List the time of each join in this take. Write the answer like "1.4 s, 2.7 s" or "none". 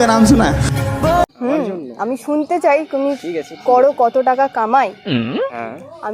1.4 s